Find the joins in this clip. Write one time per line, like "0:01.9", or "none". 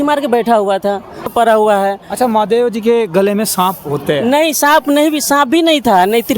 0:01.3